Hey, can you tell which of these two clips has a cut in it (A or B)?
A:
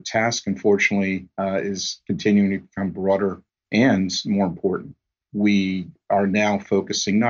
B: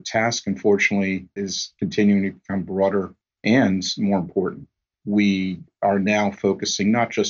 B